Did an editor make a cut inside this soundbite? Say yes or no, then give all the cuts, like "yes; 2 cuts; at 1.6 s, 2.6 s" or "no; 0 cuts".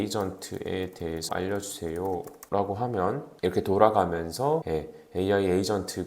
yes; 4 cuts; at 1.3 s, 2.4 s, 3.3 s, 4.6 s